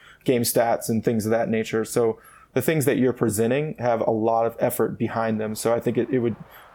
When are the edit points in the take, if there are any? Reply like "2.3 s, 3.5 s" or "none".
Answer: none